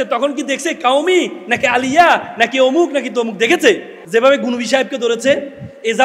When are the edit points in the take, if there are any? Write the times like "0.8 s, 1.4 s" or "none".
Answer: 3.9 s